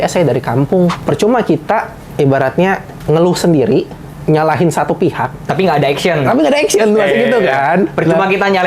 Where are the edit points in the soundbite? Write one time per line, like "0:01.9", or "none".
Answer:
0:01.0

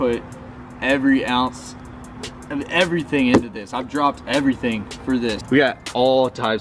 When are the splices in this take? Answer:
0:05.4

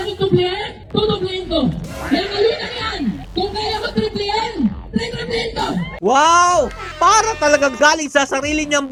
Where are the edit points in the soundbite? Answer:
none

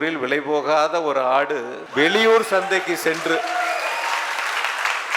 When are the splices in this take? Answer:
0:01.8

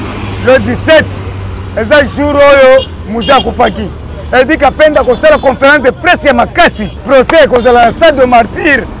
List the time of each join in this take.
0:06.9

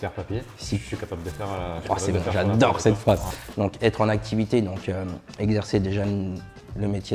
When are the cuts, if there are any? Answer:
0:03.3

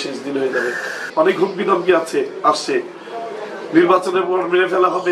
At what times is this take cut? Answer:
0:01.1

